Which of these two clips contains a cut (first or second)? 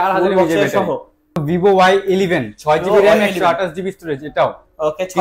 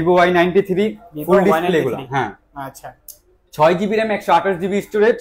first